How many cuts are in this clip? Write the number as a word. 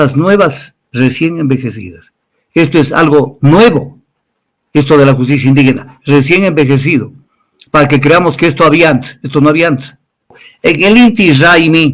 one